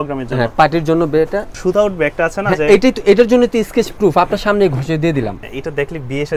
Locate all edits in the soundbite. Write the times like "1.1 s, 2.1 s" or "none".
1.5 s, 5.4 s